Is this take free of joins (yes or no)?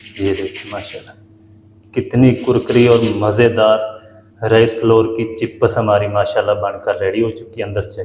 yes